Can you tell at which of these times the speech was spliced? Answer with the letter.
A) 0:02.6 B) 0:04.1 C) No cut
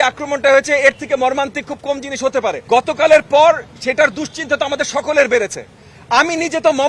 A